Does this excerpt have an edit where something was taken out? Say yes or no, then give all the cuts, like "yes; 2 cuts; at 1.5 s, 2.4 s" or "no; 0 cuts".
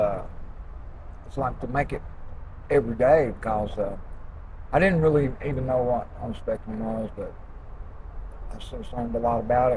no; 0 cuts